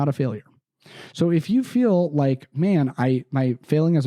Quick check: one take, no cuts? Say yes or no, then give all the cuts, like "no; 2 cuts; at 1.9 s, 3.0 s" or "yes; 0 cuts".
yes; 0 cuts